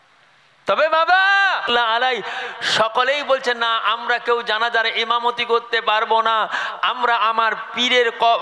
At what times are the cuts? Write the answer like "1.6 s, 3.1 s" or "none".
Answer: 1.7 s

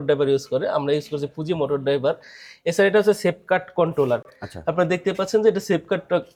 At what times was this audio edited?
none

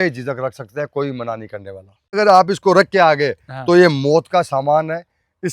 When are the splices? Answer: 2.1 s

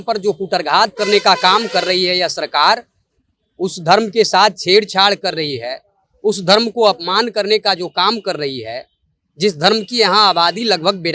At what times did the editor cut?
none

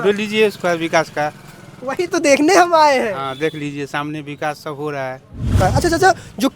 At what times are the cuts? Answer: 5.6 s

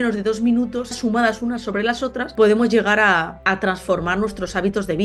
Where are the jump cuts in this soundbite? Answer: 0.9 s, 2.2 s, 3.3 s

